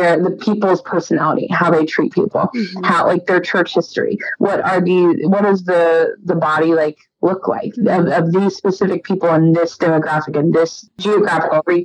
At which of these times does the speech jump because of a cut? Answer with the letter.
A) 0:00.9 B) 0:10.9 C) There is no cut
B